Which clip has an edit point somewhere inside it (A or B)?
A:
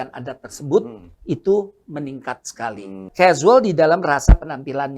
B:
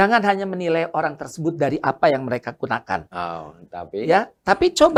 A